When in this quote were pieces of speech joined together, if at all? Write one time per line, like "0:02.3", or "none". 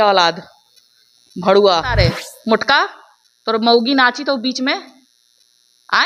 0:01.9

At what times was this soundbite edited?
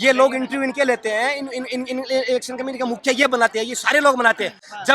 none

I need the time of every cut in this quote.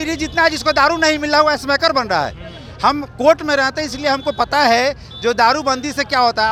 none

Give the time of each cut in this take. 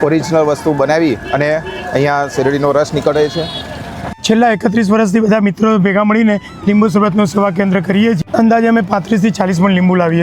0:04.1
0:08.2

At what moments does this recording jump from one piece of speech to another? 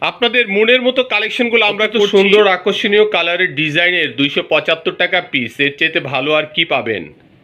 0:02.1

